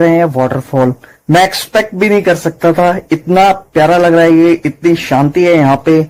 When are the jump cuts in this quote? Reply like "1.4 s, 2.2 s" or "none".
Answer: none